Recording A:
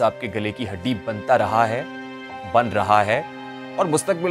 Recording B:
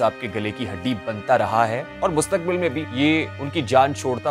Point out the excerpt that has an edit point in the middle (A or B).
B